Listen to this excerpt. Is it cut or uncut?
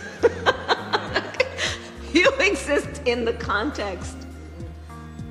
uncut